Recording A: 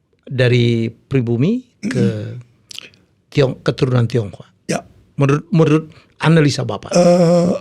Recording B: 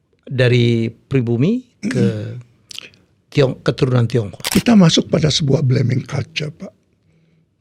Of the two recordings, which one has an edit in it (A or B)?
B